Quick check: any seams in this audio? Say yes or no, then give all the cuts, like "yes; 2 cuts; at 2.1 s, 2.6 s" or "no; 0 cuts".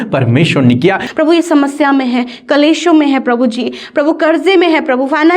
yes; 1 cut; at 1.1 s